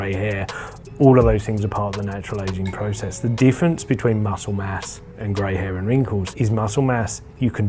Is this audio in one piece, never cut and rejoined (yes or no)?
no